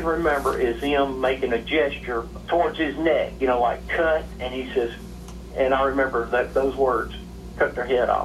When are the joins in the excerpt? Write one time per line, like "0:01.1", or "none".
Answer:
0:02.3
0:04.4